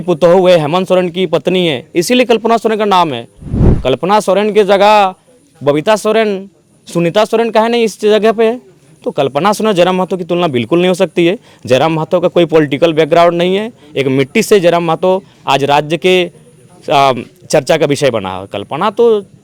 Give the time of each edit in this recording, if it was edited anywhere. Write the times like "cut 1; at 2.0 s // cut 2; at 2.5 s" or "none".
none

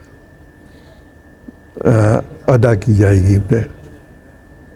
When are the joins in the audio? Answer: none

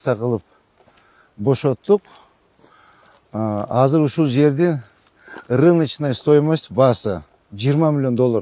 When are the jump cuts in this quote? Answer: none

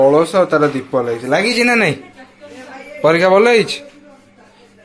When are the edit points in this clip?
none

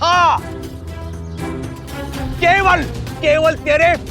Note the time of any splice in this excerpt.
cut 1; at 2.3 s

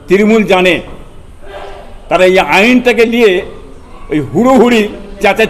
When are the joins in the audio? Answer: none

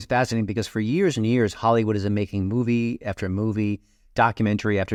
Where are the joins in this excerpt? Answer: none

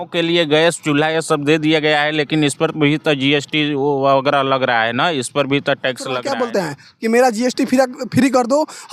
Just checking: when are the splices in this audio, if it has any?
cut 1; at 6.2 s

